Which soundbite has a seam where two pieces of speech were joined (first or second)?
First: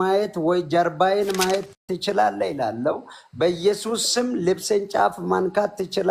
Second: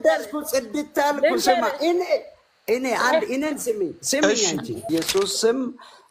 second